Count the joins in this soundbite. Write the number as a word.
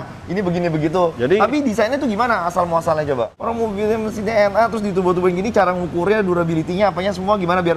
two